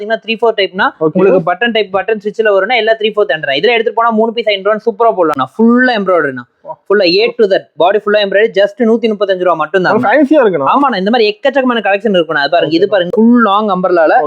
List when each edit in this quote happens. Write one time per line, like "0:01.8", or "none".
0:05.4
0:13.1